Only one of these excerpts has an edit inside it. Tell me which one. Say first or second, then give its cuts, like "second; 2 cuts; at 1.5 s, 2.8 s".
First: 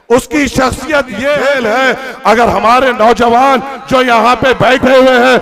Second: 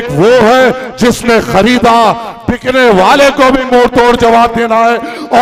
first; 1 cut; at 1.4 s